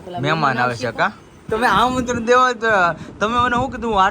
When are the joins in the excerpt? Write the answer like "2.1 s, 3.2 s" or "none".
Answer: 1.3 s